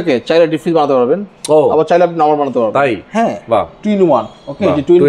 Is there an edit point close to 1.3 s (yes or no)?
no